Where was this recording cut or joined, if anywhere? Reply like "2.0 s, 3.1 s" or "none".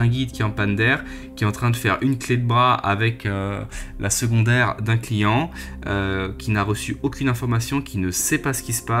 none